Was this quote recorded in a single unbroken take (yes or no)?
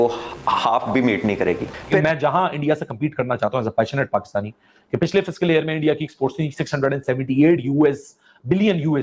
no